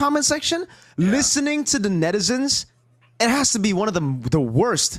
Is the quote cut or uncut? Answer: uncut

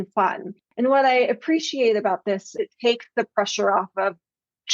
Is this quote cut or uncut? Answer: cut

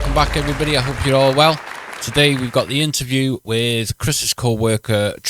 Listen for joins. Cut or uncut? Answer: uncut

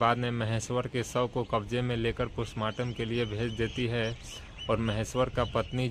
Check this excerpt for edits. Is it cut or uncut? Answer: uncut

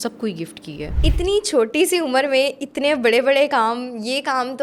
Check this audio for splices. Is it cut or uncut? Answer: cut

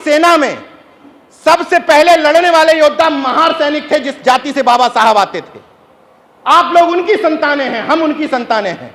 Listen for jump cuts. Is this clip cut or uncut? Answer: uncut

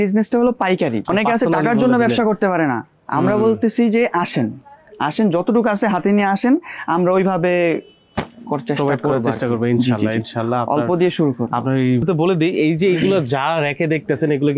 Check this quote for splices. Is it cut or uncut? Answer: cut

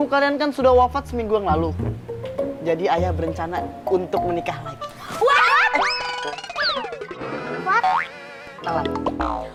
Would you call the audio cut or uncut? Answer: uncut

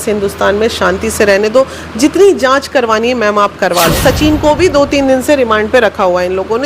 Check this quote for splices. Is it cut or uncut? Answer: cut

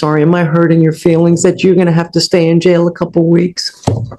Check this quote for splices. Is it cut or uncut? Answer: uncut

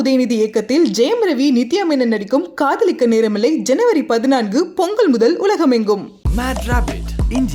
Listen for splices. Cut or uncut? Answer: uncut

